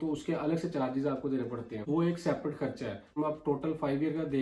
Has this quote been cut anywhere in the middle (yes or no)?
no